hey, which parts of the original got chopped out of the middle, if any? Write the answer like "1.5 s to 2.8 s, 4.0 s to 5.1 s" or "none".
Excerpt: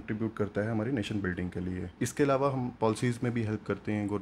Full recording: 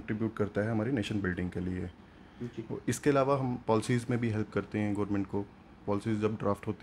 1.9 s to 2.8 s